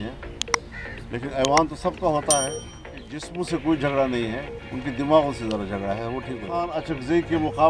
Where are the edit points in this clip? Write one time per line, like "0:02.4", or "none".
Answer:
0:03.2
0:06.5